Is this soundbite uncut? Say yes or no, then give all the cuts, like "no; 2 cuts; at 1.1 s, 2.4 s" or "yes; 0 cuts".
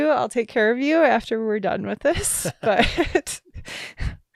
yes; 0 cuts